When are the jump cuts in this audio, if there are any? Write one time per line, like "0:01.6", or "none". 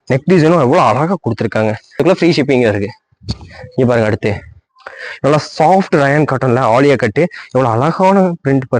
0:02.0